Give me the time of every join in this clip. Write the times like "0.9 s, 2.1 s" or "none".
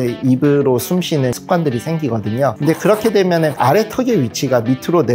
none